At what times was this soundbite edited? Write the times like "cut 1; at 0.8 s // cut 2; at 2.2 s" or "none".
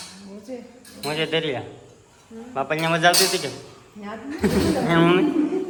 none